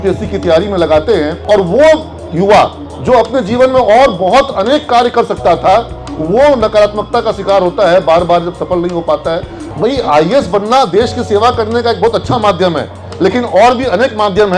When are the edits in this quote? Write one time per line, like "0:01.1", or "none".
0:01.4
0:09.6